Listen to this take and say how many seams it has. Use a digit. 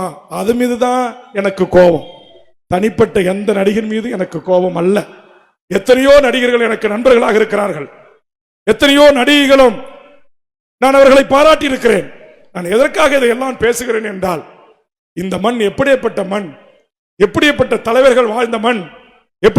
0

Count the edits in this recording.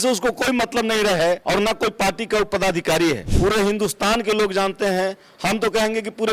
2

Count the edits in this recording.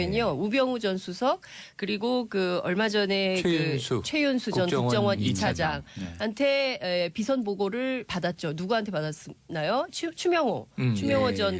0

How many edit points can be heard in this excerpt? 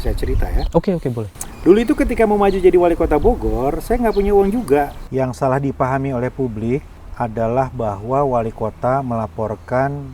2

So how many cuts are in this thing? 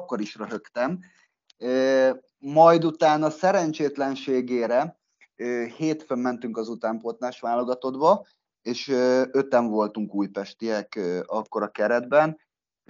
0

